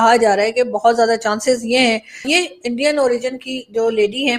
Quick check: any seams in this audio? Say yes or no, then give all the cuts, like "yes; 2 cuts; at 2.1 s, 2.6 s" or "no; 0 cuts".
yes; 1 cut; at 2.3 s